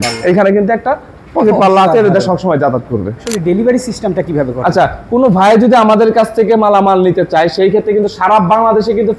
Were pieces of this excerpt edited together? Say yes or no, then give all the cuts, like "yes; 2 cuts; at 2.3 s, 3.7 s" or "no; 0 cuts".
yes; 1 cut; at 3.3 s